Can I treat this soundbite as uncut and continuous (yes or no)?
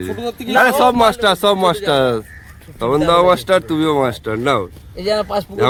yes